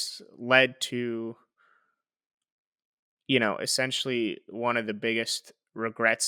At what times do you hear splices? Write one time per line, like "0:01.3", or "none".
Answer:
none